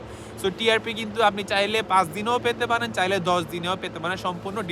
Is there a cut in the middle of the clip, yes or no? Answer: no